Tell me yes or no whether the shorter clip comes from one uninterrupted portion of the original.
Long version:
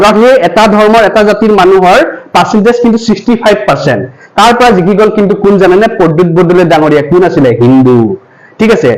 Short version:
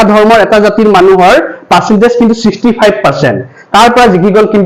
yes